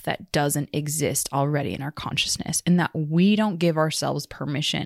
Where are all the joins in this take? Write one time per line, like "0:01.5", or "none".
none